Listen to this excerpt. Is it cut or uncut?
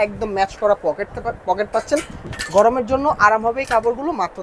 cut